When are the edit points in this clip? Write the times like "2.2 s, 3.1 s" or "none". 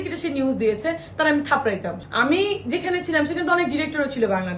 2.0 s